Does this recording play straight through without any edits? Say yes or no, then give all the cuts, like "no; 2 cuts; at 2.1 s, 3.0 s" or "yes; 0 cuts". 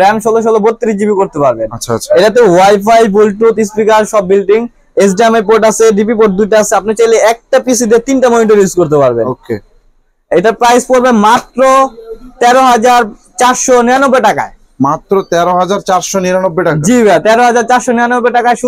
yes; 0 cuts